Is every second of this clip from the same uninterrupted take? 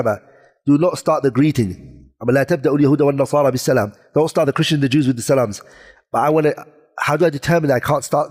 yes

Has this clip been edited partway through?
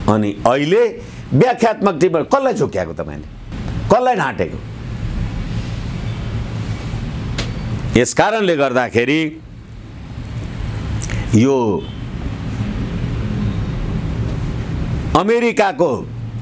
no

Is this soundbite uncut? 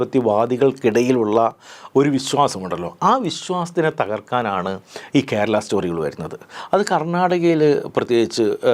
yes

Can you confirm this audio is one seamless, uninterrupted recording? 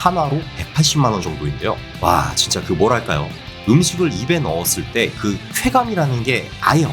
no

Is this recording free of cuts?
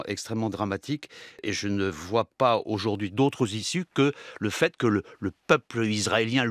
no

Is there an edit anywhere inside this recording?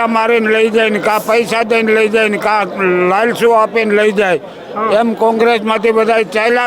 no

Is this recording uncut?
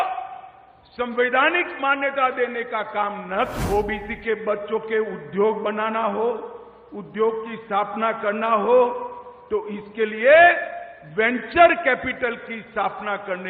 no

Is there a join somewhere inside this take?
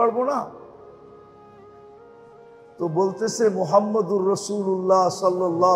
yes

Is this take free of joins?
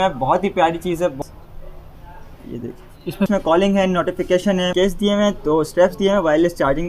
no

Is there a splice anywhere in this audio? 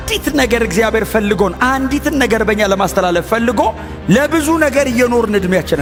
no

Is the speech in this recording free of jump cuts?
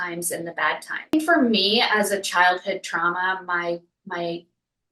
no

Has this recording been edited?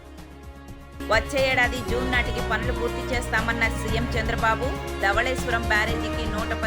yes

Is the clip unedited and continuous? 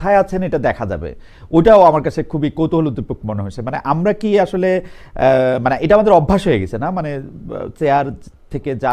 yes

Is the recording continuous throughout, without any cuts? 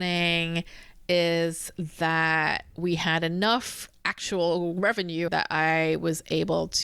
no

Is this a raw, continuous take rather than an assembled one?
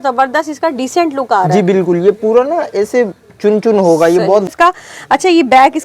no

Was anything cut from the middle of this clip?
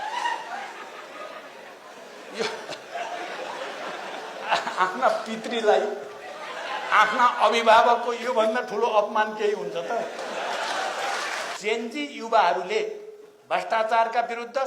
yes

